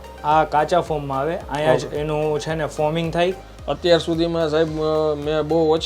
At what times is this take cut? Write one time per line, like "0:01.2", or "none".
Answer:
0:03.5